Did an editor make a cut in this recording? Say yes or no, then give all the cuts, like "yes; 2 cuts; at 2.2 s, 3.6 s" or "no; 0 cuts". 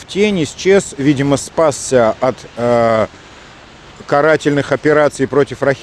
no; 0 cuts